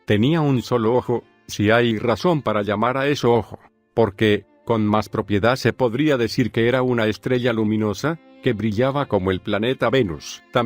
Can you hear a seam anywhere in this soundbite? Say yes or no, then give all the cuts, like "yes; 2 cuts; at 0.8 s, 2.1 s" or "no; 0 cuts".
yes; 1 cut; at 9.1 s